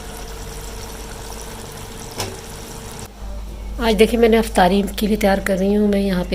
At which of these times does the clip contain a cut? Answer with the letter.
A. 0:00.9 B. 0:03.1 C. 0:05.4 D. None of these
B